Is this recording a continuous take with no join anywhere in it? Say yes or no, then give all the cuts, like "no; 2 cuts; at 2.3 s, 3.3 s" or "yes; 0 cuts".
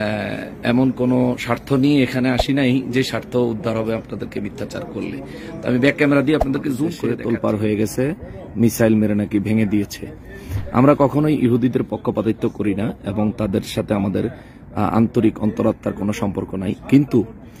no; 1 cut; at 7.0 s